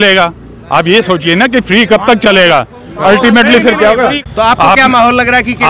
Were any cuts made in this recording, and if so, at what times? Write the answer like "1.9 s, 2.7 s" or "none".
4.3 s